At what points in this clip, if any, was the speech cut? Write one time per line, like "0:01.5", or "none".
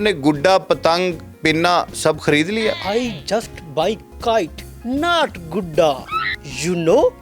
0:02.8